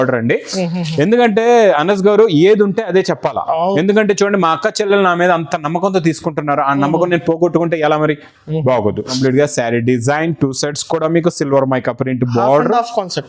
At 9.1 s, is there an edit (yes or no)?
yes